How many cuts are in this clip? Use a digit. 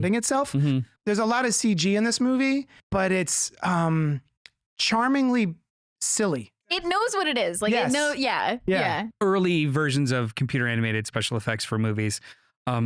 4